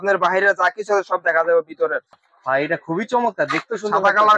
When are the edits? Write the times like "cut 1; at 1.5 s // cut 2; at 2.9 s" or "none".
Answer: cut 1; at 2.1 s